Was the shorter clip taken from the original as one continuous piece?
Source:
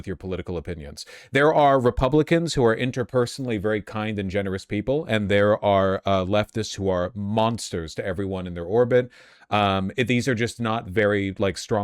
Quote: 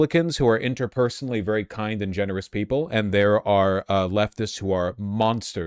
yes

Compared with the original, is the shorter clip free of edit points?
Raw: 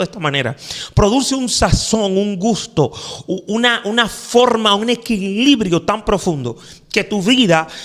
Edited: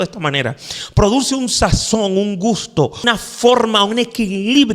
no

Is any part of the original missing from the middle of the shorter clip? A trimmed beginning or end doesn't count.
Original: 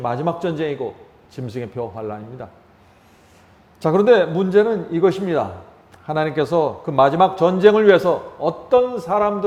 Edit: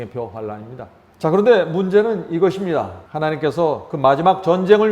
yes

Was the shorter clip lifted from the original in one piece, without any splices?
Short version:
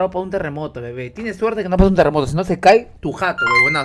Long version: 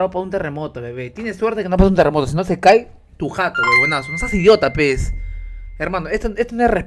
no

